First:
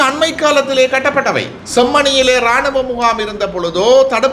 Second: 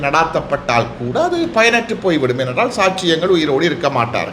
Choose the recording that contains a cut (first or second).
first